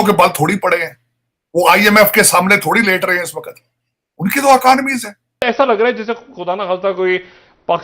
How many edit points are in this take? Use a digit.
1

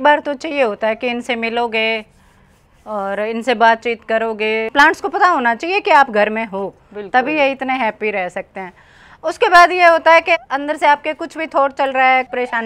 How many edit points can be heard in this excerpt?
1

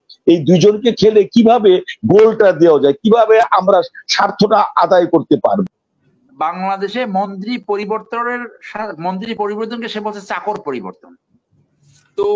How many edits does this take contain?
1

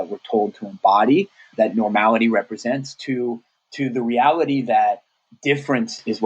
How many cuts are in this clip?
2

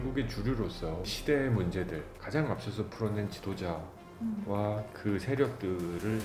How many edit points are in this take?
1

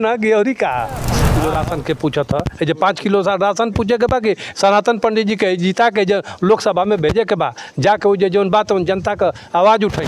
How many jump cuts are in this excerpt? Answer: 1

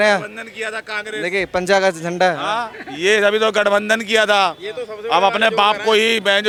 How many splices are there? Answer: 0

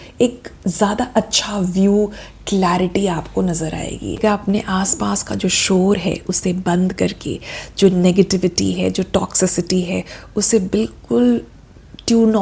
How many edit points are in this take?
1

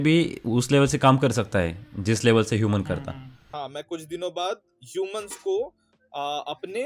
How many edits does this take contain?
1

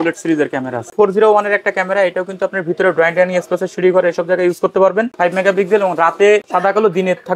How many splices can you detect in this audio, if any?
3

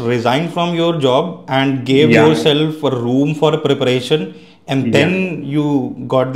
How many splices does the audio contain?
0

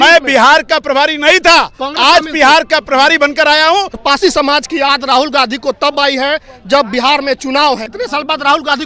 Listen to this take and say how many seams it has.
2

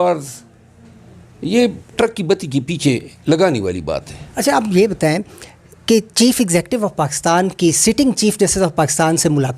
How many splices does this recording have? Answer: 1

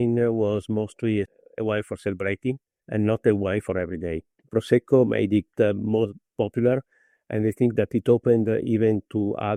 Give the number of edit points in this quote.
0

